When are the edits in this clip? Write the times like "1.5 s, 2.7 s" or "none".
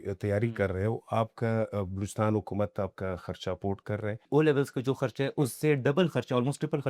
4.2 s